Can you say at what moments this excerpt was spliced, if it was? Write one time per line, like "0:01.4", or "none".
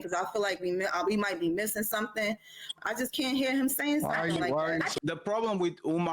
0:04.9